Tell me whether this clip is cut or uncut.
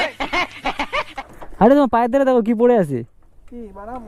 cut